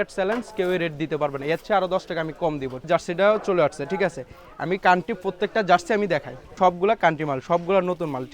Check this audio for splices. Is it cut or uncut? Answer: cut